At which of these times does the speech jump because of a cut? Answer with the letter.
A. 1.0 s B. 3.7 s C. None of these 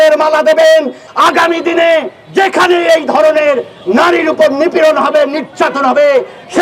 A